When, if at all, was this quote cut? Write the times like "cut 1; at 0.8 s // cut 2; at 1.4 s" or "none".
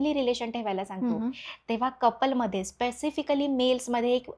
none